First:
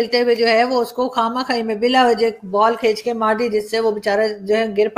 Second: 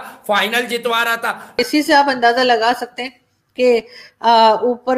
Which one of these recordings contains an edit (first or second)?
second